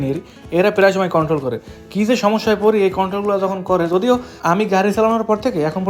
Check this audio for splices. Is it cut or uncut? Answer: uncut